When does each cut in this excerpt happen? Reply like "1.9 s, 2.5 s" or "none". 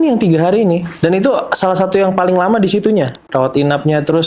3.2 s